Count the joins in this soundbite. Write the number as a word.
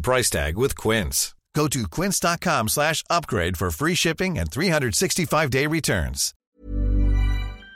one